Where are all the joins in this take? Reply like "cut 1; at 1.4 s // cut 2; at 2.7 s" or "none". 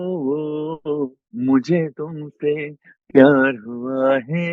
cut 1; at 1.2 s